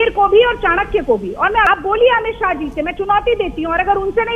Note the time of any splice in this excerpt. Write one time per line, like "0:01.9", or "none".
0:01.7